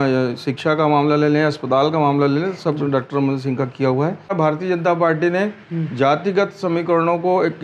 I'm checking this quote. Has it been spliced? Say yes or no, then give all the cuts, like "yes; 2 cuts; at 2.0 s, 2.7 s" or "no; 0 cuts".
yes; 1 cut; at 4.3 s